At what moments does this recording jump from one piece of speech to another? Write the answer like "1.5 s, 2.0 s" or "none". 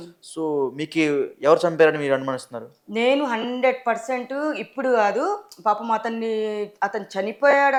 none